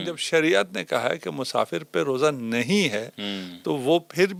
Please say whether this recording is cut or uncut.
uncut